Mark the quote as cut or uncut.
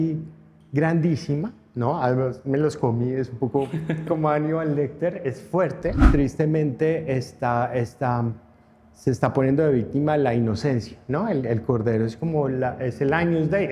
cut